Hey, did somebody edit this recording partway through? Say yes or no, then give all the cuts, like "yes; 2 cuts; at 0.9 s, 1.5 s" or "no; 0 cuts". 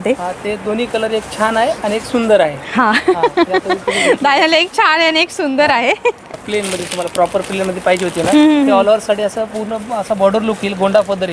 yes; 1 cut; at 6.4 s